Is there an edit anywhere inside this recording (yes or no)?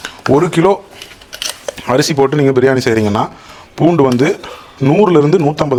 no